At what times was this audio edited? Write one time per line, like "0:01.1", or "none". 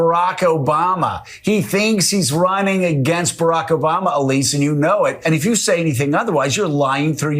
0:05.2